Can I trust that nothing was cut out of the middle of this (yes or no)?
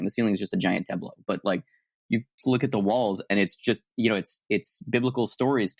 yes